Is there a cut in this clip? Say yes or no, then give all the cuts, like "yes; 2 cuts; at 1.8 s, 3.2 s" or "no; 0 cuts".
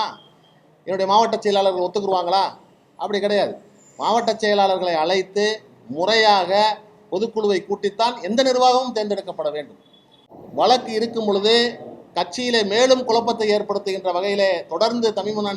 yes; 1 cut; at 10.1 s